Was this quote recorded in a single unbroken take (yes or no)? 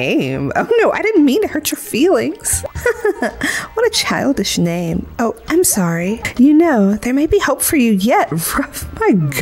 no